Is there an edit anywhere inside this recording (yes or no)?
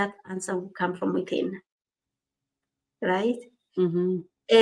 no